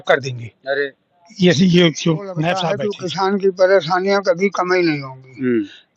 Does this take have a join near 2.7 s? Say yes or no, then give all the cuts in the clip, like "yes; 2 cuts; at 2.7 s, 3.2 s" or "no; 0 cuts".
yes; 1 cut; at 2.7 s